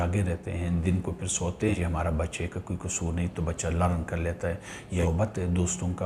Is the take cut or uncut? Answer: cut